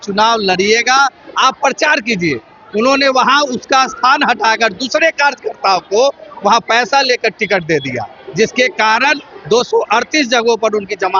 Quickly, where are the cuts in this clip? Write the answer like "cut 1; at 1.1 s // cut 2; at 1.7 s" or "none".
none